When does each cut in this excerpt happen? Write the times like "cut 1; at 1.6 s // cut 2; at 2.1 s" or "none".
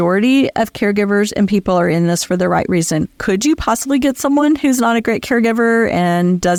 none